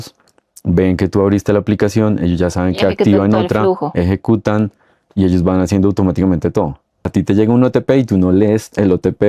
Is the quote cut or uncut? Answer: cut